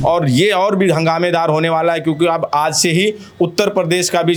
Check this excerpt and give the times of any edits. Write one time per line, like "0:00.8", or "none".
none